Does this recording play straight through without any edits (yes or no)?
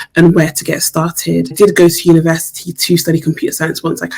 no